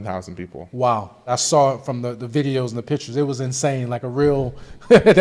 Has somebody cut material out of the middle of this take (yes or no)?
yes